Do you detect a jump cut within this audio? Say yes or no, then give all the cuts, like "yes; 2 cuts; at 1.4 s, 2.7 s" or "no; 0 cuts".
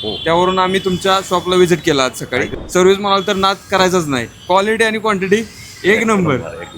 yes; 1 cut; at 2.6 s